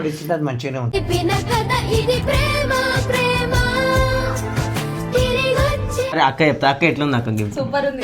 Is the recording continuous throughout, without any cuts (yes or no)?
no